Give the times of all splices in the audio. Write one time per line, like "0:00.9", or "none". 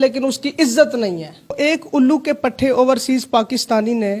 0:01.6

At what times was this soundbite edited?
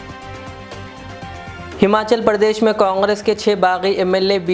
0:01.7

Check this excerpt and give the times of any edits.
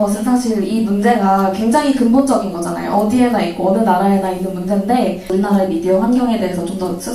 0:05.3

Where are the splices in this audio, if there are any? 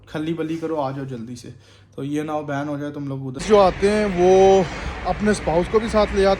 0:03.4

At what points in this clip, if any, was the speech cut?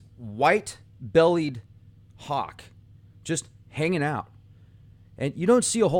0:03.1

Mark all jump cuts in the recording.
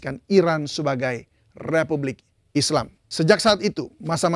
0:03.0

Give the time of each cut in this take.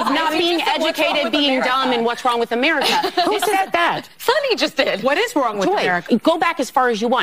0:06.0

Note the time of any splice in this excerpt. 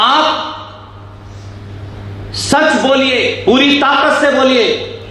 0:03.4

